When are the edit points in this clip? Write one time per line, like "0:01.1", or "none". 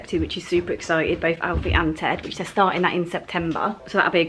none